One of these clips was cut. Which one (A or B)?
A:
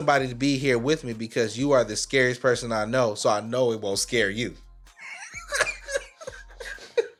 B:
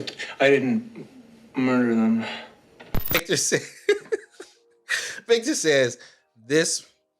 B